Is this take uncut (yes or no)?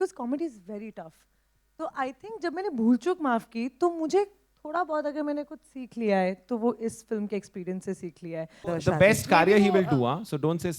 no